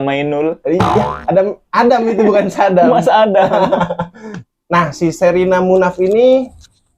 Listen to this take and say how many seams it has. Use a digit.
1